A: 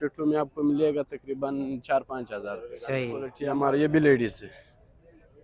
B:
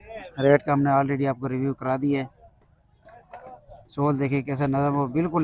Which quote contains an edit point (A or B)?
A